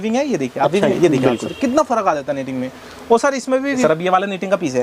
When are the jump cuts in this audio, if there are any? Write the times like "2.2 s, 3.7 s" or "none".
1.0 s, 3.8 s